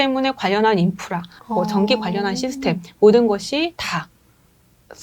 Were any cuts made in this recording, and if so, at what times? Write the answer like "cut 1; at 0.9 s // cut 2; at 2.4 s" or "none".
cut 1; at 1.4 s